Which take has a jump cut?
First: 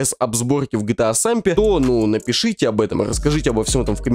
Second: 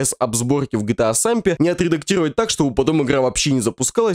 second; 1 cut; at 1.5 s

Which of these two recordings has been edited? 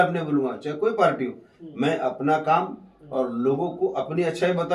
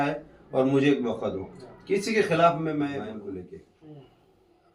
second; 1 cut; at 3.0 s

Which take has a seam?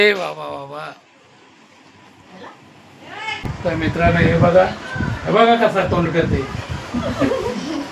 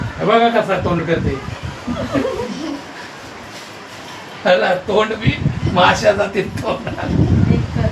first; 1 cut; at 3.4 s

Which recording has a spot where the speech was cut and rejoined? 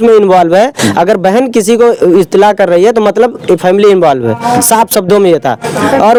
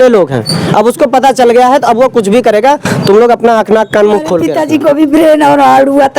second; 1 cut; at 4.5 s

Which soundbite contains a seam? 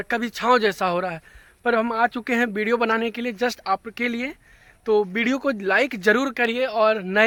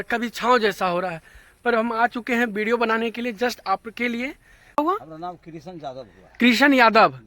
second; 1 cut; at 4.8 s

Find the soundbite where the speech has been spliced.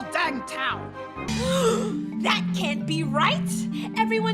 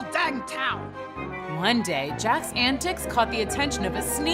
first; 1 cut; at 1.3 s

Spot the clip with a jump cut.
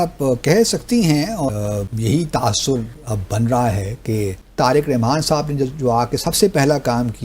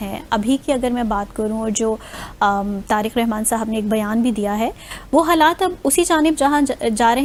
first; 2 cuts; at 1.4 s, 4.4 s

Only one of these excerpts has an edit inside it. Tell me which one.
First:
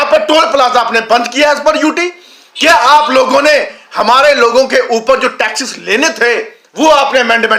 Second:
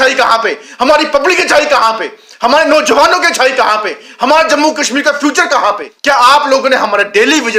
second; 1 cut; at 5.9 s

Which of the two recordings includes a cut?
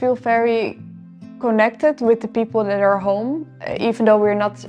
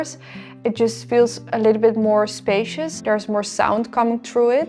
second; 1 cut; at 3.0 s

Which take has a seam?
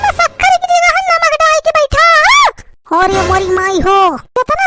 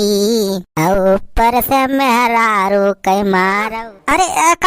second; 1 cut; at 3.7 s

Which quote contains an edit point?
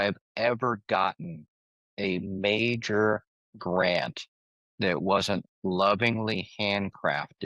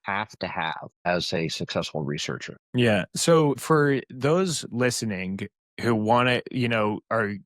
second; 3 cuts; at 1.1 s, 2.5 s, 3.6 s

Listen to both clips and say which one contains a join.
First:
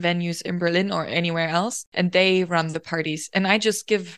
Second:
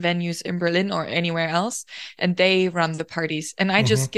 first; 1 cut; at 1.8 s

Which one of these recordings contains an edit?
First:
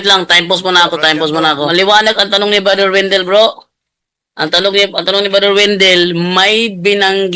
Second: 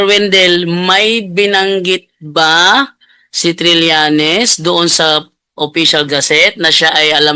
first; 1 cut; at 1.7 s

